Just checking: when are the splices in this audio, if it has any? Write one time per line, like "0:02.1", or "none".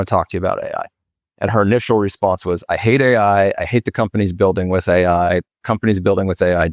none